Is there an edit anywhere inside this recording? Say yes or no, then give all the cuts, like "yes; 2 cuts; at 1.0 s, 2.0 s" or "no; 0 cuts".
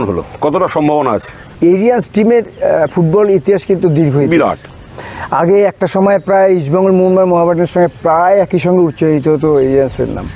no; 0 cuts